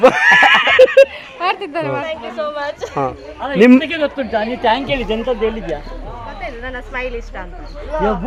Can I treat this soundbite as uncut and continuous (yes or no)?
yes